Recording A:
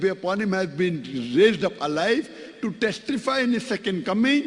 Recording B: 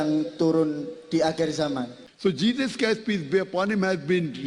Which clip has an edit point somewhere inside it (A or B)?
B